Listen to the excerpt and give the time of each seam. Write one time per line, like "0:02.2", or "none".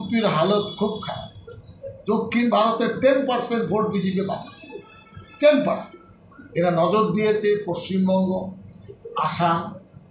none